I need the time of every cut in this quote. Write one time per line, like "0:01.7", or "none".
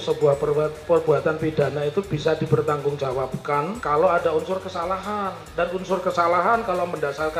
0:03.8